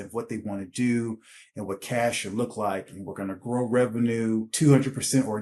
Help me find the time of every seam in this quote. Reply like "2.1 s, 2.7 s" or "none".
4.5 s